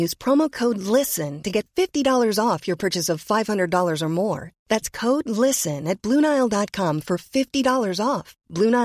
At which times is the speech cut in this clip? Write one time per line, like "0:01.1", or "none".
none